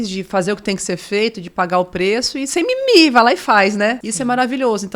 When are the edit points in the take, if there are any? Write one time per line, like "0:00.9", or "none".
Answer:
0:04.1